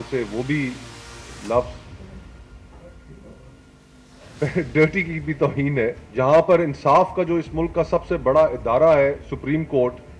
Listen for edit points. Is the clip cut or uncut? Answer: cut